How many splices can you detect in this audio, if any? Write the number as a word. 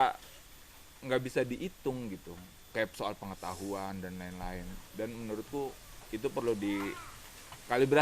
zero